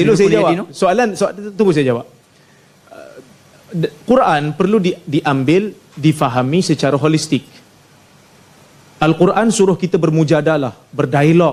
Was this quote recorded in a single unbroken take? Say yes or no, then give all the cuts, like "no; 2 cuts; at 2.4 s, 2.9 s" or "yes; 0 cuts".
yes; 0 cuts